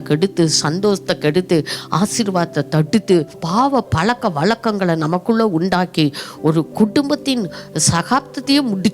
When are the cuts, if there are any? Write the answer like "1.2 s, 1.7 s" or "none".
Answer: 3.4 s